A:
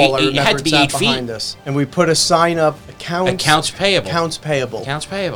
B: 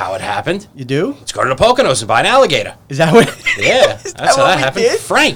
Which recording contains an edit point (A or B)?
A